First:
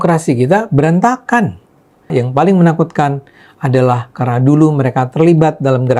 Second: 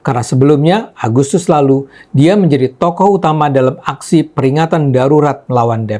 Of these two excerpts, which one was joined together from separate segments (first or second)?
first